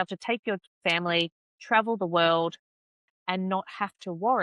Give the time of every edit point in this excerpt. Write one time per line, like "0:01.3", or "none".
0:03.1